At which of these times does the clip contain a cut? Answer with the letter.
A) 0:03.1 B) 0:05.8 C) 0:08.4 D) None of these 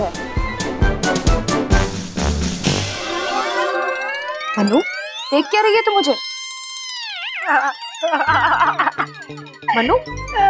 A